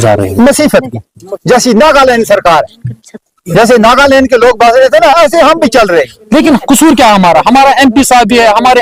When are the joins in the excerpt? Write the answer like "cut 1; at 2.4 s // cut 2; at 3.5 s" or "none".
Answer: none